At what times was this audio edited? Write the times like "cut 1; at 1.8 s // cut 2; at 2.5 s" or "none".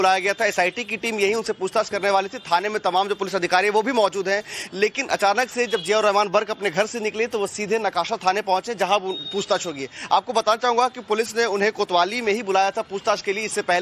cut 1; at 6.0 s